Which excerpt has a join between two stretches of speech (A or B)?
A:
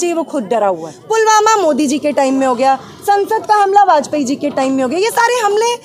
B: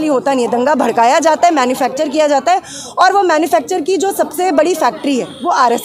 A